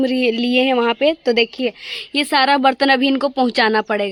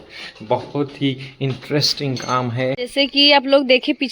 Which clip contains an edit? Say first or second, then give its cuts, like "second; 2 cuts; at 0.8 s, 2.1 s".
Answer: second; 1 cut; at 2.8 s